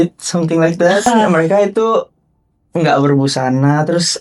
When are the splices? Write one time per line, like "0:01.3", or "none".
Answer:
0:01.1